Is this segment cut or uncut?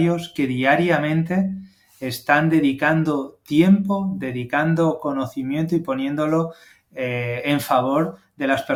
uncut